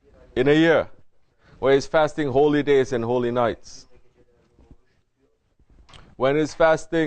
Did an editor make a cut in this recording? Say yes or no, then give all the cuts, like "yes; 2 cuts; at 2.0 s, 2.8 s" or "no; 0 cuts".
yes; 1 cut; at 6.1 s